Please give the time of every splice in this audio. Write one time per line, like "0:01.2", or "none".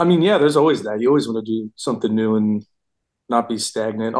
none